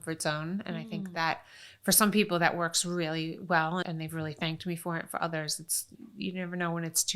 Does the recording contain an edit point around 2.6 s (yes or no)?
no